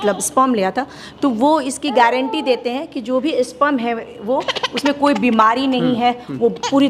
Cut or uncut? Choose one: uncut